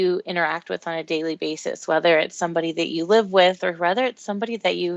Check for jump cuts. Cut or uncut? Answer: cut